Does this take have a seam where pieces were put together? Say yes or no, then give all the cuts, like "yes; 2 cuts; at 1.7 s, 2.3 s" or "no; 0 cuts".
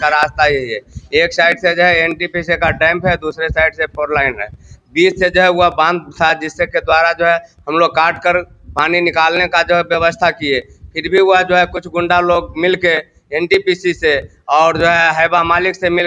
no; 0 cuts